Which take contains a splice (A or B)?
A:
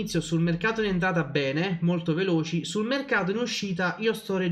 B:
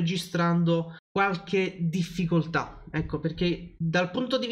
B